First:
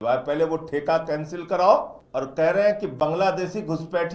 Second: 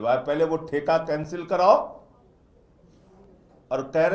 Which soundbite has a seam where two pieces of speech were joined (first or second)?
first